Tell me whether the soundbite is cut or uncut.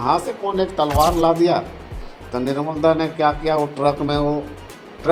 uncut